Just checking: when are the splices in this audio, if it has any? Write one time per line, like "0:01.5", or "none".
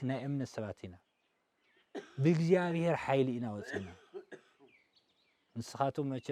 none